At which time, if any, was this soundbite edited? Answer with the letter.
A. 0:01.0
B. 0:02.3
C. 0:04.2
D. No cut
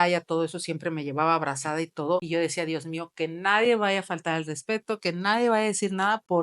B